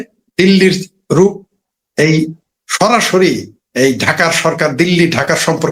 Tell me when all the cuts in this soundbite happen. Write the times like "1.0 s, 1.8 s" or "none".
none